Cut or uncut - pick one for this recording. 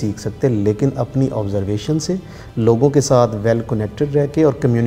uncut